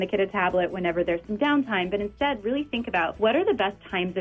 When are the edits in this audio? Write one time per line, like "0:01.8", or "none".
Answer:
0:03.1